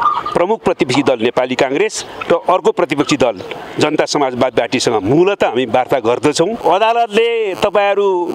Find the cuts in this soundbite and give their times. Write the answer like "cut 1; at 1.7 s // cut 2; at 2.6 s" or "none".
cut 1; at 6.6 s

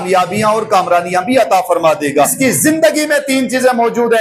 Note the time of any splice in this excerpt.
cut 1; at 2.3 s

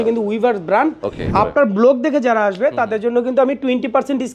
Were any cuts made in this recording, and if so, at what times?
cut 1; at 1.3 s

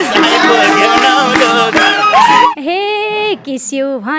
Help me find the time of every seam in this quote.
cut 1; at 2.5 s

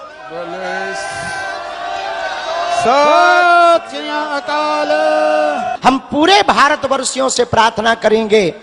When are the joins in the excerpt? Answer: cut 1; at 5.7 s

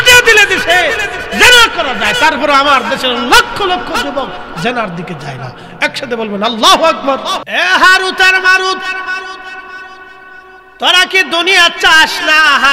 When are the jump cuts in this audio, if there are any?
cut 1; at 7.4 s

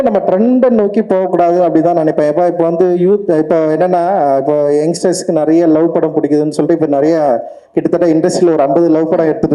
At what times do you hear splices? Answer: none

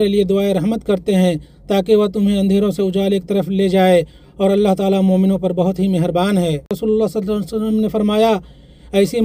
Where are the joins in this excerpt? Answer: cut 1; at 6.7 s

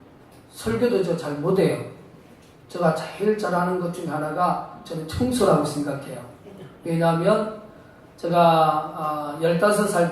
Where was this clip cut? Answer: cut 1; at 9.1 s

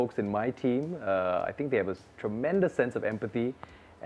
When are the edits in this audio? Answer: none

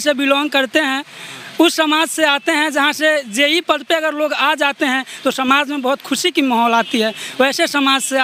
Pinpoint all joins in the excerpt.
none

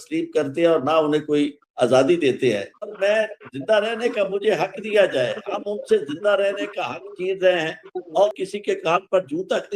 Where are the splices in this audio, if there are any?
cut 1; at 2.9 s // cut 2; at 8.3 s

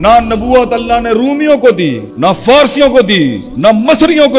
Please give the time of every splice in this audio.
cut 1; at 2.0 s // cut 2; at 3.4 s

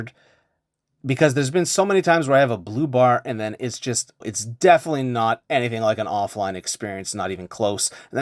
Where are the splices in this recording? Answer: cut 1; at 4.3 s

